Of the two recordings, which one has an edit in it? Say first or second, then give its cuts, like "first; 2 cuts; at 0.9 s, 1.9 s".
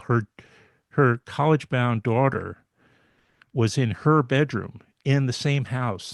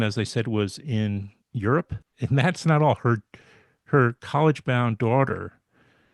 second; 1 cut; at 2.0 s